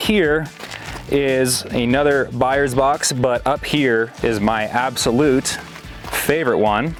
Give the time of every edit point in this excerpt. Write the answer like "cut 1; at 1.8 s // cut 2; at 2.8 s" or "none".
none